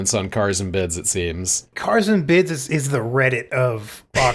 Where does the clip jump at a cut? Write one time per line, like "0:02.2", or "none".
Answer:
0:01.5
0:02.6